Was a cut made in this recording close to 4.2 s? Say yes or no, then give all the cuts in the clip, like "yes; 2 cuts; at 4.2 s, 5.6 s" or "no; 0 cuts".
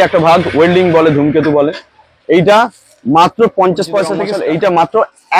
yes; 1 cut; at 4.2 s